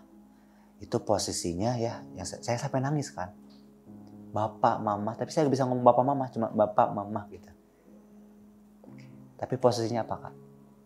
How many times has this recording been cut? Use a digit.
2